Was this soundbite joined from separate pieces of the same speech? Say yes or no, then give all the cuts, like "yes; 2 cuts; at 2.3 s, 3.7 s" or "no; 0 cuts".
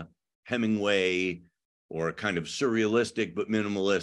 no; 0 cuts